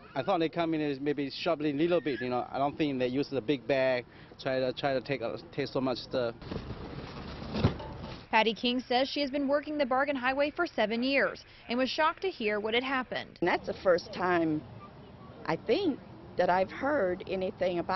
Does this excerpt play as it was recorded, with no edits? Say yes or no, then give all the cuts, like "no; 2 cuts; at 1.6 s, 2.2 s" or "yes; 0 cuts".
no; 1 cut; at 6.8 s